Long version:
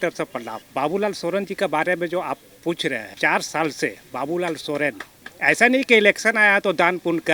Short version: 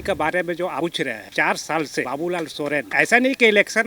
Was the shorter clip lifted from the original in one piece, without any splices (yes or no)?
no